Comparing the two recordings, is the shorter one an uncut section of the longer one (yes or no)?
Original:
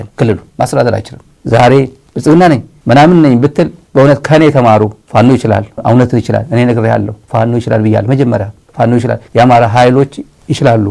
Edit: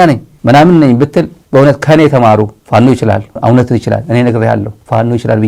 yes